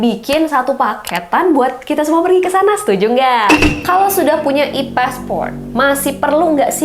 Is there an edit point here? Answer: yes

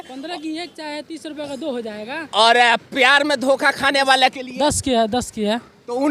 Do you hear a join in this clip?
no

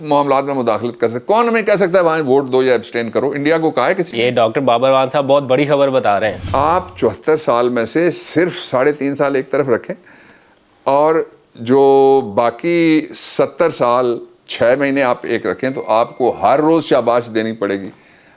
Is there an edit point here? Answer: yes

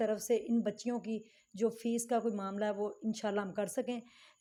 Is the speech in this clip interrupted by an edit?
no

